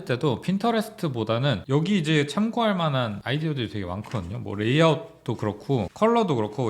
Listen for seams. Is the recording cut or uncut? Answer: cut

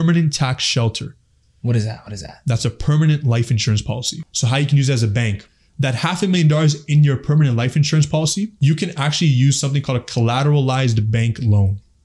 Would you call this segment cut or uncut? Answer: cut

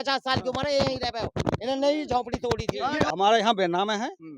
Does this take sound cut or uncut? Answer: cut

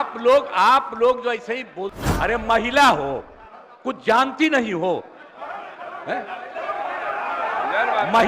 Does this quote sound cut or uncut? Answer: cut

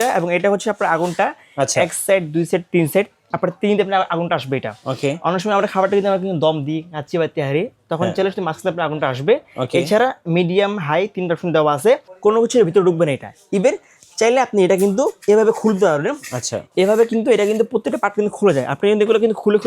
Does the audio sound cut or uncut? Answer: cut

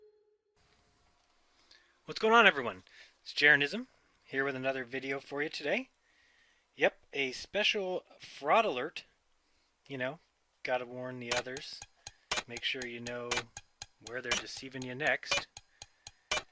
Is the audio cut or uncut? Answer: uncut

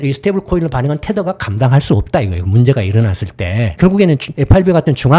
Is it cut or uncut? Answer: cut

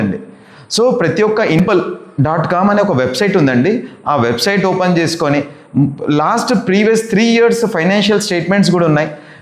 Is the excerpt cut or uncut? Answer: cut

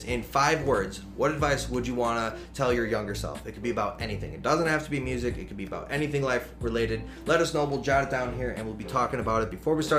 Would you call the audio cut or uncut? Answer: uncut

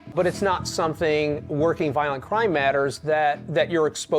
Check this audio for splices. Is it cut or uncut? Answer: uncut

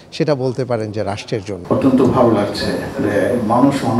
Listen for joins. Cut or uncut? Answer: cut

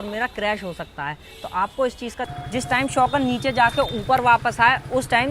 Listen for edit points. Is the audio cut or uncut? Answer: cut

